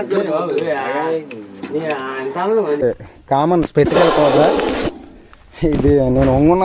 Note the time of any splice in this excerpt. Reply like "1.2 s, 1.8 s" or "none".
2.8 s